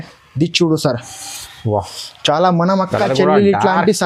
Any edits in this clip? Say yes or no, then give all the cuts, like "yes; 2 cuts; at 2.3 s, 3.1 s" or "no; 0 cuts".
no; 0 cuts